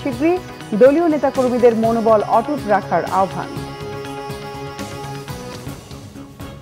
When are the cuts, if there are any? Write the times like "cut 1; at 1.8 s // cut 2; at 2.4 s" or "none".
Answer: cut 1; at 5.5 s